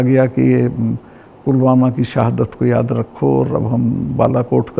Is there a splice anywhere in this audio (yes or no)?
no